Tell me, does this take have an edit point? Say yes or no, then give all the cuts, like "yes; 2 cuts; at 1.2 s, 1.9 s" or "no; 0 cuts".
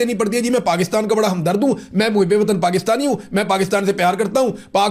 no; 0 cuts